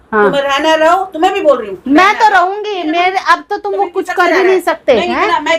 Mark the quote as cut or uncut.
uncut